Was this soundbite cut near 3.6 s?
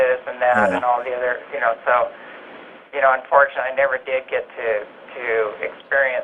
yes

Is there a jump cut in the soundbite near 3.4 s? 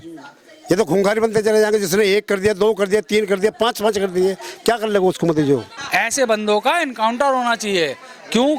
no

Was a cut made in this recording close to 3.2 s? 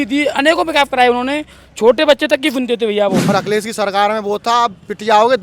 yes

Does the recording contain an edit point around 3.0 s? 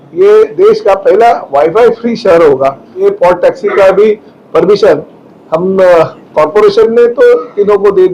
yes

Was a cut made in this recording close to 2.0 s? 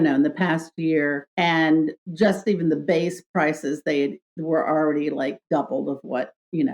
yes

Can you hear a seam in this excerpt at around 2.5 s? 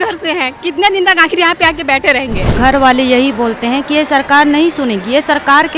yes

